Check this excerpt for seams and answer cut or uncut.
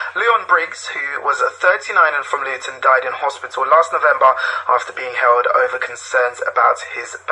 cut